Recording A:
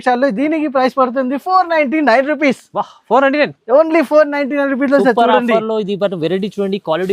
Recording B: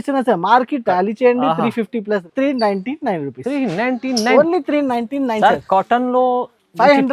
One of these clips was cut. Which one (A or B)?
B